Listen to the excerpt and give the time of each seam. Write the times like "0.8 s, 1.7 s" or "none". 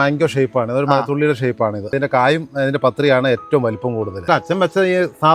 1.9 s, 4.3 s

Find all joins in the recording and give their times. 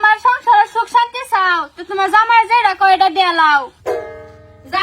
3.8 s

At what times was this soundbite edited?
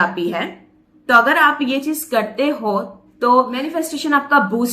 3.7 s

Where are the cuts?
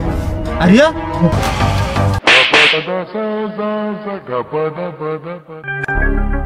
1.3 s

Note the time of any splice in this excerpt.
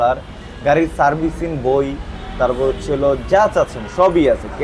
none

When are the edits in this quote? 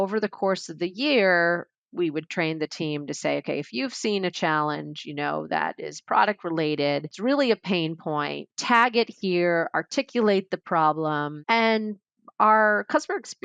7.1 s, 8.5 s, 11.3 s

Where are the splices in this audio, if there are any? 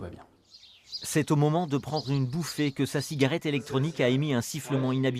none

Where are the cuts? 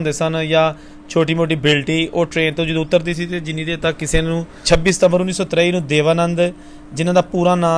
4.5 s

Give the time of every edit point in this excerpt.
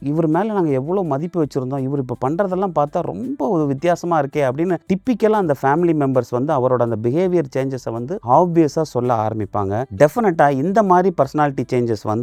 none

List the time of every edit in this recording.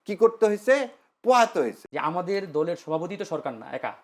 1.8 s

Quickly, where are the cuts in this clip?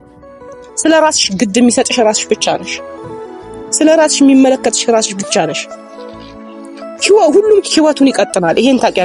none

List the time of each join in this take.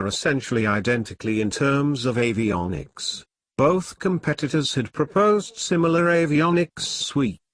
none

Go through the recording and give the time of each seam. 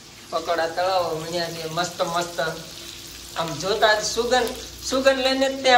none

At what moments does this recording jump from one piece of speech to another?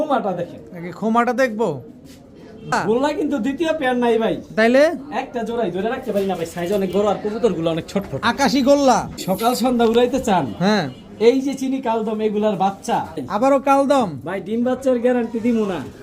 2.8 s, 9.2 s, 13.2 s

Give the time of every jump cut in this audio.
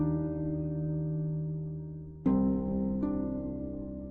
3.0 s

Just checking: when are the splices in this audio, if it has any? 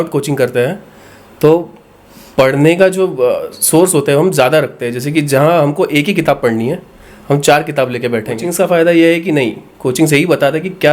8.5 s

